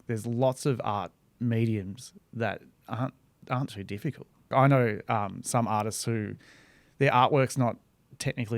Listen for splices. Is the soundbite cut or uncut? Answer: cut